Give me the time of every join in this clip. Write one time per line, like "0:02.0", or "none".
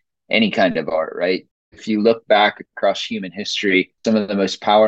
0:01.5
0:03.9